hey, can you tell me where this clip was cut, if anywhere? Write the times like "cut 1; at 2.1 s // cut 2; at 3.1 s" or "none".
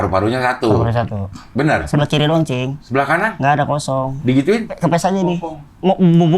cut 1; at 1.9 s // cut 2; at 3.2 s // cut 3; at 4.7 s